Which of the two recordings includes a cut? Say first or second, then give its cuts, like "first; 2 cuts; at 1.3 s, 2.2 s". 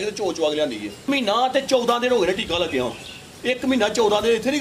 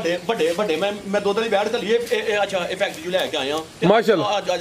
first; 1 cut; at 1.0 s